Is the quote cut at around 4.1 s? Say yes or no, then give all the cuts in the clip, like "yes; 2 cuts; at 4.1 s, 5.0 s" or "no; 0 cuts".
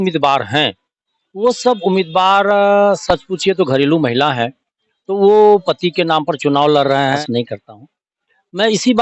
no; 1 cut; at 7.2 s